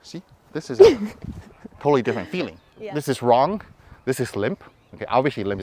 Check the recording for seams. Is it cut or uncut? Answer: cut